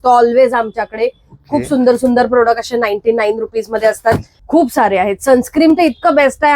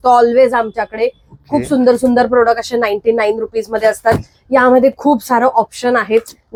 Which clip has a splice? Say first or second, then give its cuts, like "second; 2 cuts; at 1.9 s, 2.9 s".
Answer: first; 1 cut; at 4.4 s